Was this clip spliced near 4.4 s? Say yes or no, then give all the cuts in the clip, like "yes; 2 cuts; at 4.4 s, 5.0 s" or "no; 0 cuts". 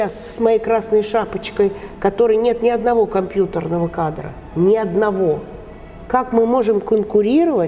no; 0 cuts